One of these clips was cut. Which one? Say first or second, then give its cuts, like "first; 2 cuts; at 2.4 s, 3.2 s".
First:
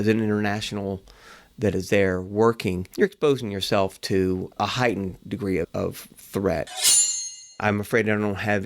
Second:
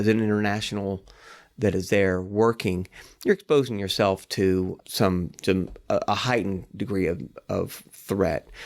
first; 4 cuts; at 2.8 s, 4.6 s, 5.7 s, 7.0 s